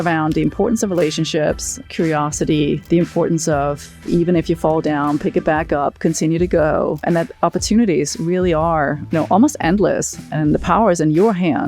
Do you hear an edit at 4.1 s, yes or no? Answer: yes